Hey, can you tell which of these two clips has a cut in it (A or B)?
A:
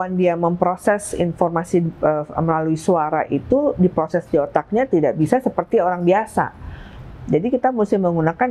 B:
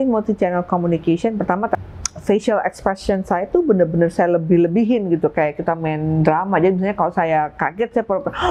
B